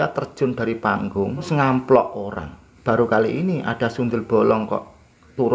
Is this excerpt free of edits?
no; 2 cuts; at 1.5 s, 2.7 s

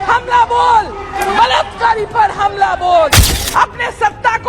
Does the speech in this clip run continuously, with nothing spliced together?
no; 2 cuts; at 1.0 s, 3.3 s

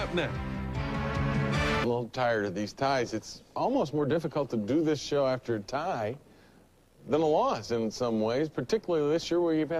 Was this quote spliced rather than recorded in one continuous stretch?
no; 0 cuts

